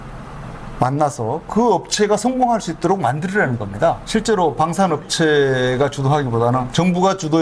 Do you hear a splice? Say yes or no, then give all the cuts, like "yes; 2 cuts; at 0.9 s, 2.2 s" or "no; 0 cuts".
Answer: yes; 1 cut; at 4.0 s